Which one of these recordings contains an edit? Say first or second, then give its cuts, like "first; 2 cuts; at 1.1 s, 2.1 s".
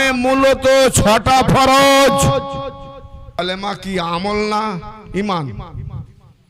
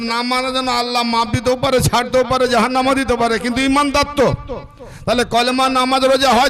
first; 1 cut; at 3.4 s